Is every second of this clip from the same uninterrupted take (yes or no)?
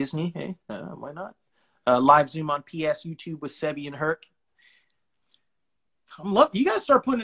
yes